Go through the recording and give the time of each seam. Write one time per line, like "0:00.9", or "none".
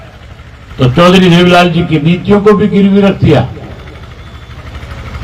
none

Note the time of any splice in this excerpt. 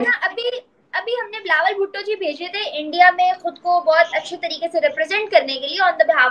none

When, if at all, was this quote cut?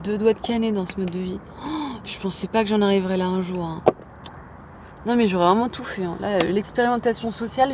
none

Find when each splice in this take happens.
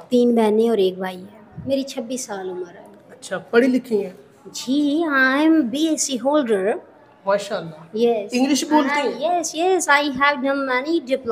0:01.5

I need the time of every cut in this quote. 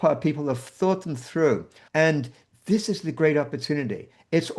0:01.8

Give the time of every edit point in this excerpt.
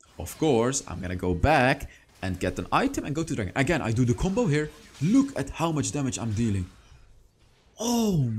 none

